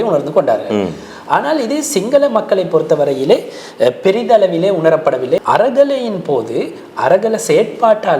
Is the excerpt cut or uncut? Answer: cut